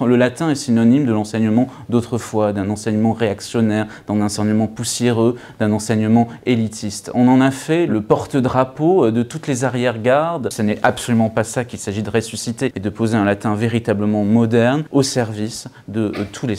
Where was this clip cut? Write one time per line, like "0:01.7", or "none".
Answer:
0:07.0
0:10.5
0:12.8
0:14.9